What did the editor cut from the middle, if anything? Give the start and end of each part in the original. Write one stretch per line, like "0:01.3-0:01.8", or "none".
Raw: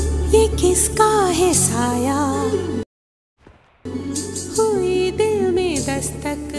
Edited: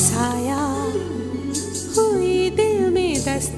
0:02.8-0:03.9